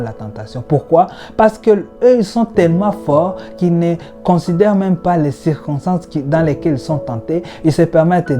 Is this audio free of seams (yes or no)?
no